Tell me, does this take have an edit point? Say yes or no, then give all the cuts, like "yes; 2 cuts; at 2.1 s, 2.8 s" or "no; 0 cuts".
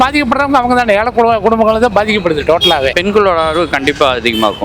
yes; 1 cut; at 3.0 s